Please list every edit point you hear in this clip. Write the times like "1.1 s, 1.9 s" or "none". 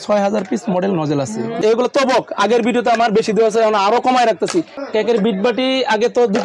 1.5 s, 4.8 s